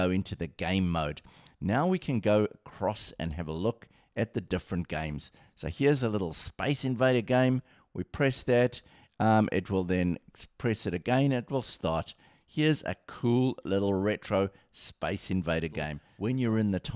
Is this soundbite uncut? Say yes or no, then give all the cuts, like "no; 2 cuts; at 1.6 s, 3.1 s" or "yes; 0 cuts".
no; 1 cut; at 16.0 s